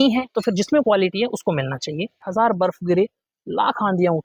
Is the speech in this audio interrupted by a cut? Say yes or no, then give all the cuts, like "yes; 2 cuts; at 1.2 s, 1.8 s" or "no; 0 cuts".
yes; 1 cut; at 2.2 s